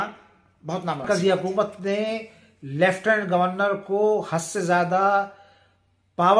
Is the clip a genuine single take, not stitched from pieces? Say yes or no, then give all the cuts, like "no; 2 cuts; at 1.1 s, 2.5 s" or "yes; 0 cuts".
no; 1 cut; at 1.0 s